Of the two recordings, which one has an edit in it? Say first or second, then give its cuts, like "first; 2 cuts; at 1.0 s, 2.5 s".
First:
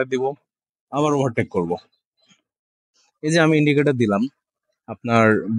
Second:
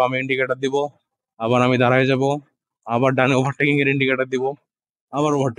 first; 1 cut; at 2.9 s